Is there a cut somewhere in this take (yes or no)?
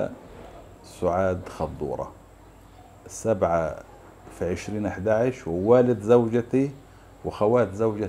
no